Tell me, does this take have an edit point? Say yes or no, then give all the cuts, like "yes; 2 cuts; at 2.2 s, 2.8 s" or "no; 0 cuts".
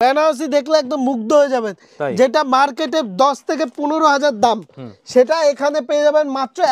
no; 0 cuts